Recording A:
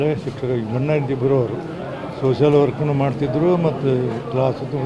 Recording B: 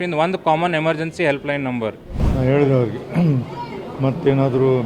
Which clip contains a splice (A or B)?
B